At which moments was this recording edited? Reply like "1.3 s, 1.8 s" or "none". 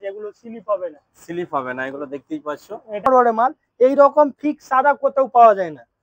3.1 s